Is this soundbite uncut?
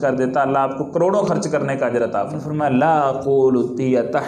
no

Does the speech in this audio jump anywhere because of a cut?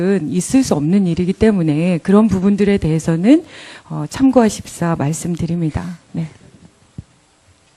no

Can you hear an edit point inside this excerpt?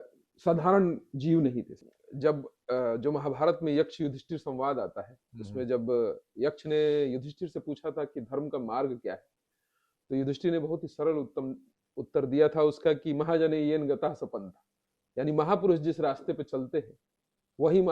yes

